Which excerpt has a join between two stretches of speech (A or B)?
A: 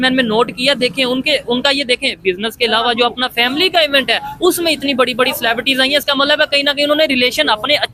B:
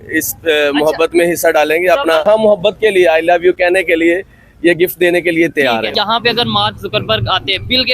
B